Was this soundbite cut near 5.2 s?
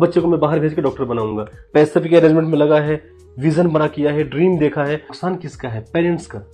yes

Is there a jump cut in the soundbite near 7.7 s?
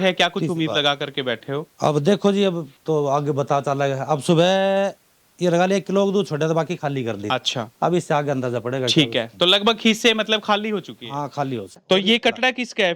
no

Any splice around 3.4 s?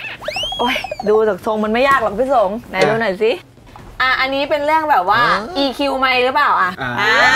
yes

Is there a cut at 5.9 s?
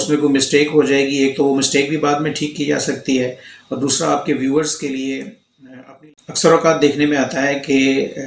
yes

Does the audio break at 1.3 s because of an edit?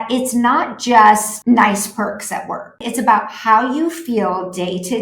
yes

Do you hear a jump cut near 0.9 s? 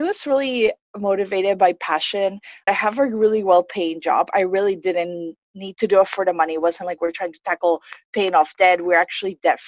no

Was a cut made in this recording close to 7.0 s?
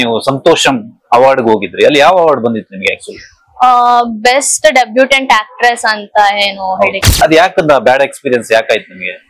yes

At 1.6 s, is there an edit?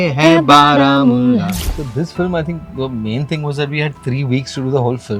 yes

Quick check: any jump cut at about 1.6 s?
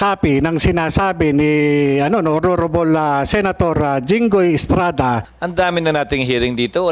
no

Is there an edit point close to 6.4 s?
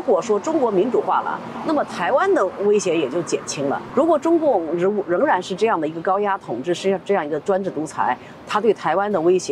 no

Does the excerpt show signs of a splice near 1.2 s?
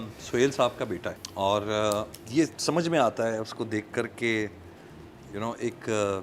yes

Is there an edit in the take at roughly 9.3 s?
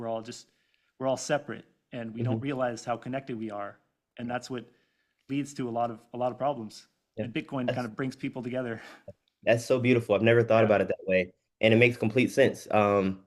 no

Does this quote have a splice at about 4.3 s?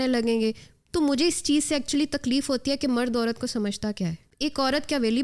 yes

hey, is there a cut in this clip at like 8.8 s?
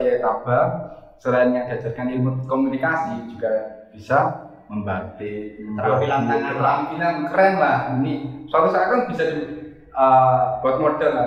no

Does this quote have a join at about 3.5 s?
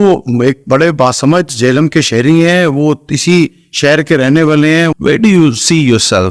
no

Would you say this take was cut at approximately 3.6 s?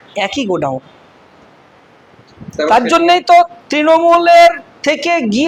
no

